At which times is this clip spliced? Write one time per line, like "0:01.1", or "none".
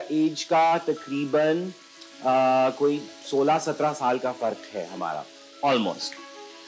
none